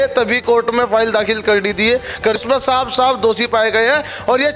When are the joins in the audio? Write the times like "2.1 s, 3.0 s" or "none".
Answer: 2.4 s